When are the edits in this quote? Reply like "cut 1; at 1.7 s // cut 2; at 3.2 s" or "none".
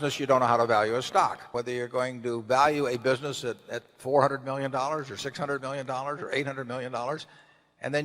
cut 1; at 1.4 s